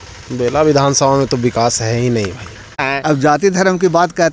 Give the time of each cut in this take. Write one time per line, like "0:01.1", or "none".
0:02.8